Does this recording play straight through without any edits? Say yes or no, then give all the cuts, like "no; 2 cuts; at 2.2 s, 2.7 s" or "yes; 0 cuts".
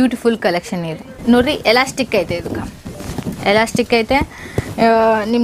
no; 1 cut; at 1.2 s